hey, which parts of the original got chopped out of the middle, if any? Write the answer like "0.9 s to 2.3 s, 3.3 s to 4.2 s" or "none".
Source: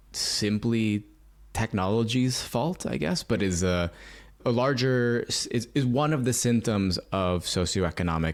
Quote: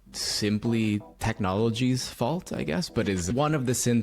1.1 s to 1.5 s, 3.6 s to 5.9 s